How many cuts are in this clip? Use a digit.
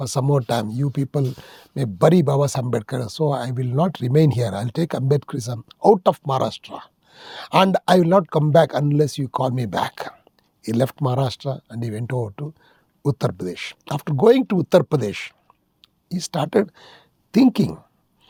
0